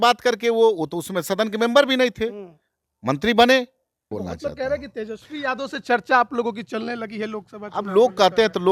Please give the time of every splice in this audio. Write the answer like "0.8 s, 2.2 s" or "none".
4.1 s